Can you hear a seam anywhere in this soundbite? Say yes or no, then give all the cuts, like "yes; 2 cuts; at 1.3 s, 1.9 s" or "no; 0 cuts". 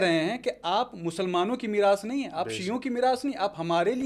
no; 0 cuts